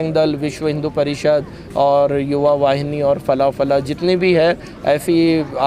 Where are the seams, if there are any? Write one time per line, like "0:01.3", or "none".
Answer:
none